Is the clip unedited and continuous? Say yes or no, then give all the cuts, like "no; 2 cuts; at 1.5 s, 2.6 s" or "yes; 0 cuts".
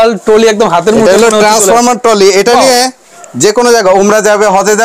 yes; 0 cuts